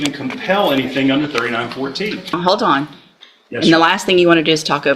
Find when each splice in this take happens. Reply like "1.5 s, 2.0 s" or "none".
2.3 s